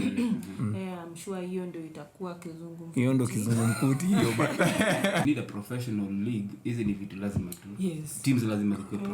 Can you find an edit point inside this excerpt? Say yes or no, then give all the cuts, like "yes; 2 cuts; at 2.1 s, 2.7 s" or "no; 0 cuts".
yes; 1 cut; at 5.2 s